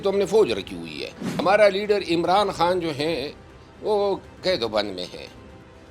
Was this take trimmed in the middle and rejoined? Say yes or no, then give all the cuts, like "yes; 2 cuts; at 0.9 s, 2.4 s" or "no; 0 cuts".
yes; 1 cut; at 1.3 s